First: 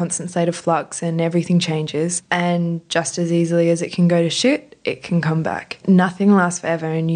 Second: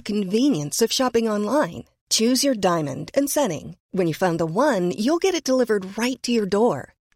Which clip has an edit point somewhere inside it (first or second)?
first